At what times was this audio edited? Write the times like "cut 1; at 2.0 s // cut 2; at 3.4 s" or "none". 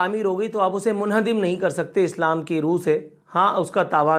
none